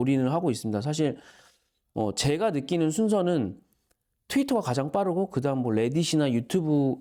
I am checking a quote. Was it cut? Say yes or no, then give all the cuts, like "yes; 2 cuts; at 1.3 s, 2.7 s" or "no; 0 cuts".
no; 0 cuts